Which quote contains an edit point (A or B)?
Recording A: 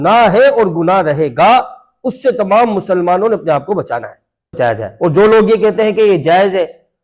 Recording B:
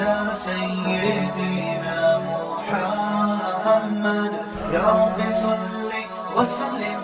A